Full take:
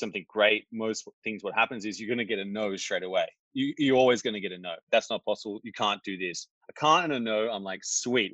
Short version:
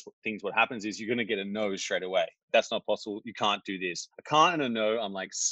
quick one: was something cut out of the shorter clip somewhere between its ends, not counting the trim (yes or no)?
yes